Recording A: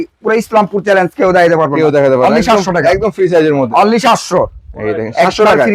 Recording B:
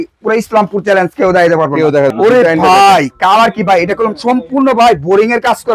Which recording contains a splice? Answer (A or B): B